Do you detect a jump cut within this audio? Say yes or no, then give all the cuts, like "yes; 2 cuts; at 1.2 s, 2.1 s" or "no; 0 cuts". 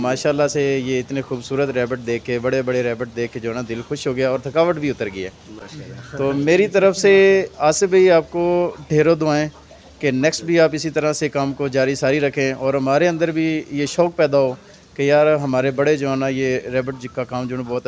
no; 0 cuts